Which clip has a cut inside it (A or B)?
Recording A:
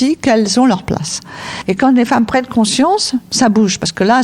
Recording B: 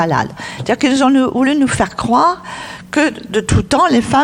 A